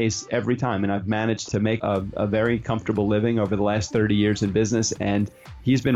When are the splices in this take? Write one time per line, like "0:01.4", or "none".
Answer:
0:01.7